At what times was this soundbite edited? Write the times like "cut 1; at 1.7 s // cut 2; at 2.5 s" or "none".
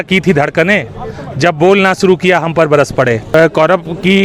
cut 1; at 3.3 s